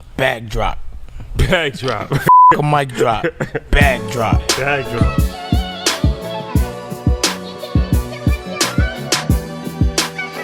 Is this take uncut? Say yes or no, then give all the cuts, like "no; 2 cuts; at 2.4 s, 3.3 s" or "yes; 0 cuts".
yes; 0 cuts